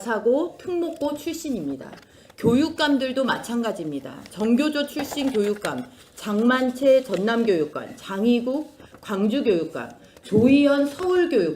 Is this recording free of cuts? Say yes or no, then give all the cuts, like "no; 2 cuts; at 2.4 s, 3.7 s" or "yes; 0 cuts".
yes; 0 cuts